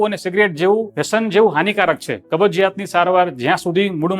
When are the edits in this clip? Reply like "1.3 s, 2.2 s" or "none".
1.0 s, 2.1 s